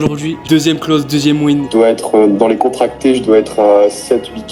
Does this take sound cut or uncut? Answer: cut